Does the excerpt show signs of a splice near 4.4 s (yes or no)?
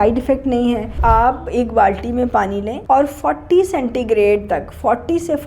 no